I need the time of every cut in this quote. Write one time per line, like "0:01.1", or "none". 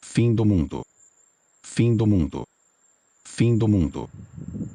none